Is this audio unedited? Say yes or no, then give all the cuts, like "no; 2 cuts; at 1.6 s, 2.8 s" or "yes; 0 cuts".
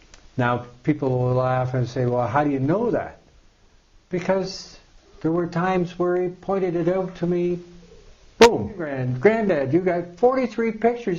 no; 1 cut; at 9.0 s